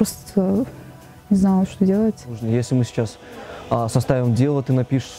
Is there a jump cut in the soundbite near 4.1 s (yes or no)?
no